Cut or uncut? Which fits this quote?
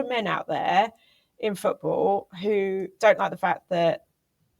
uncut